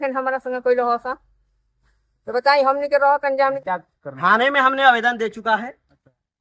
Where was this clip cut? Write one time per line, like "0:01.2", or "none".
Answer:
0:03.6